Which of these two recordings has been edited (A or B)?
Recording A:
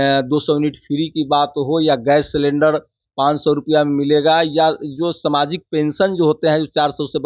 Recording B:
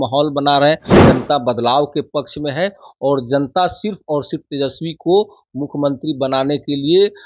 B